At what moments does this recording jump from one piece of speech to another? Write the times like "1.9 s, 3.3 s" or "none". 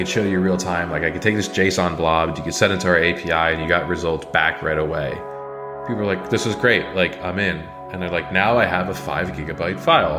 5.7 s